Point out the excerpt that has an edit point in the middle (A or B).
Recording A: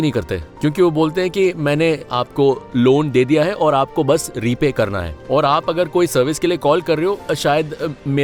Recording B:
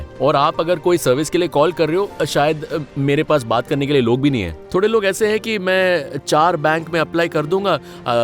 B